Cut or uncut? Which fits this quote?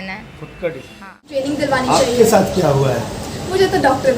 cut